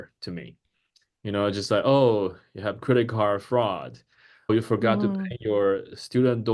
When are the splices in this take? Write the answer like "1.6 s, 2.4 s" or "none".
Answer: 4.5 s

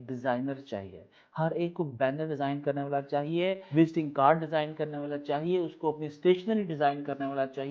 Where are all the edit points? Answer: none

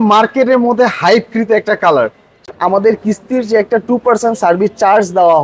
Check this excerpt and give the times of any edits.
2.3 s

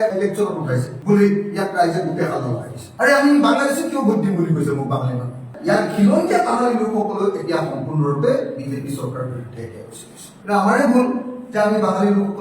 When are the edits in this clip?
2.9 s, 5.5 s

